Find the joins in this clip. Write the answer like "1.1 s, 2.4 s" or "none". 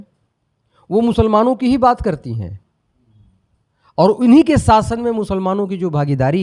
none